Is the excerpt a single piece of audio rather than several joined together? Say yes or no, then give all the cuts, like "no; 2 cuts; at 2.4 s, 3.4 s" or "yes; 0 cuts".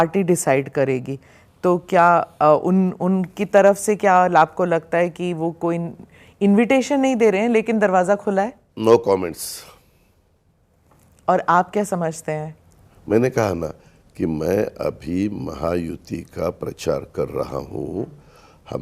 yes; 0 cuts